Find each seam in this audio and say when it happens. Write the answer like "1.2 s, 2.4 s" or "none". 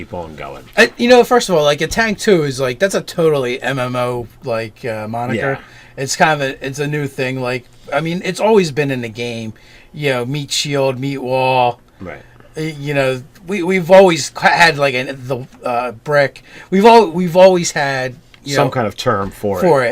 15.5 s